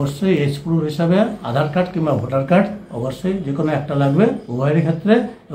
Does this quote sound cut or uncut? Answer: uncut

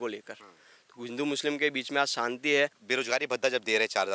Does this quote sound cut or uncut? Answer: cut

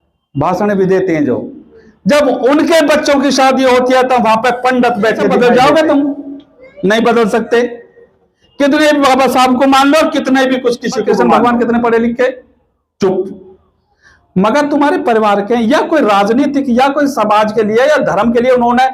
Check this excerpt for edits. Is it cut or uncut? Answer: cut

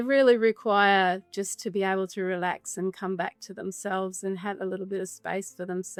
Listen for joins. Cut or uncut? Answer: uncut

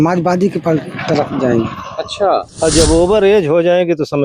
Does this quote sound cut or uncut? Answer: cut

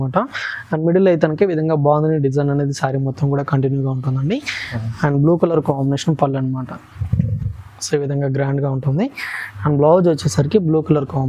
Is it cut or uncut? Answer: uncut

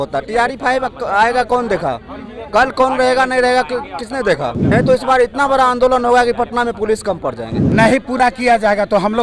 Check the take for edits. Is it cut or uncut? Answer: cut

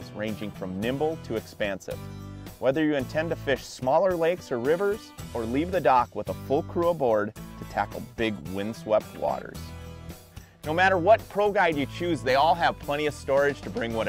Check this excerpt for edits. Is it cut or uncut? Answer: uncut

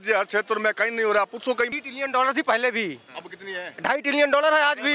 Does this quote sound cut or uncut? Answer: cut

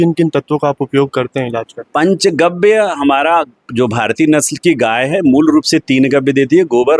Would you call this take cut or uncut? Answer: uncut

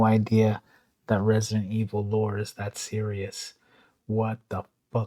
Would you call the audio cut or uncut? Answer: uncut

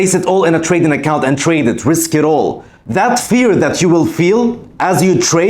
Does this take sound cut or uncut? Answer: uncut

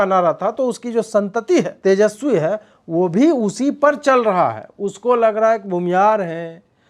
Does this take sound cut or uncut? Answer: cut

